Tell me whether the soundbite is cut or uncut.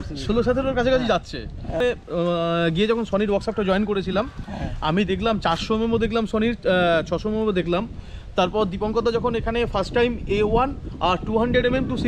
cut